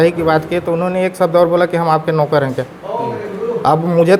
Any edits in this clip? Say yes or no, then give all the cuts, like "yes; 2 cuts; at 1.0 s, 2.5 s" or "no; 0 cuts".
no; 0 cuts